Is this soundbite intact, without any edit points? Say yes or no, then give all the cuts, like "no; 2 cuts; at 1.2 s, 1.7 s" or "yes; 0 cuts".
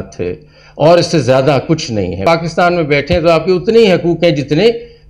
no; 1 cut; at 2.2 s